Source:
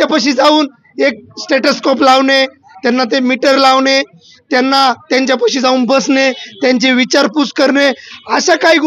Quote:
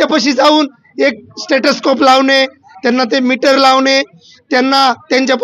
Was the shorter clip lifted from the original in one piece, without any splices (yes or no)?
yes